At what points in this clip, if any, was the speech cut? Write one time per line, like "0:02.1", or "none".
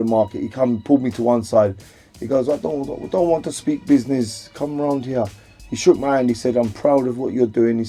none